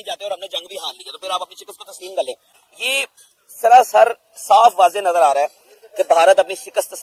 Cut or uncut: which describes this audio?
uncut